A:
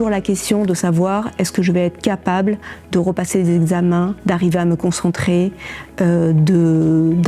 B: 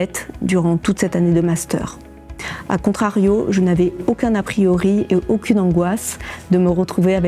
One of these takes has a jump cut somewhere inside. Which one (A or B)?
A